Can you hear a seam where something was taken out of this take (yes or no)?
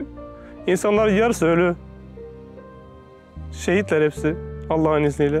no